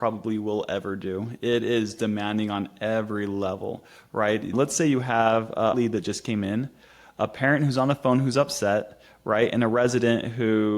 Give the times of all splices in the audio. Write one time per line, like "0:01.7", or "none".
0:04.5
0:05.7